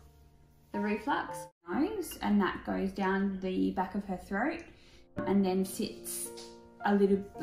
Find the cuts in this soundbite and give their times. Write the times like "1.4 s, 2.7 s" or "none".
1.7 s